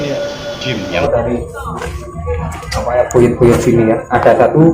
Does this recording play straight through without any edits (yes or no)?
no